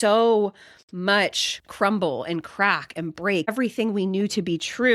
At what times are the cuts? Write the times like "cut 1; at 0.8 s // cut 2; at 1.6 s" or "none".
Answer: cut 1; at 3.5 s